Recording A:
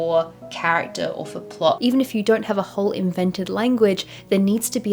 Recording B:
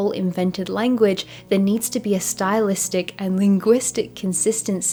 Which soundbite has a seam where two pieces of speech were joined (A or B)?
A